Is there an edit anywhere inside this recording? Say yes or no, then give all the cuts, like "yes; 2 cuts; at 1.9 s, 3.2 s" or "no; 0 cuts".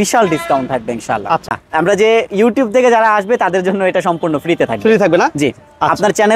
yes; 1 cut; at 1.5 s